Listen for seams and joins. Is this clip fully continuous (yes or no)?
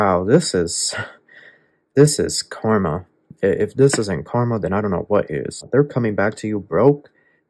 no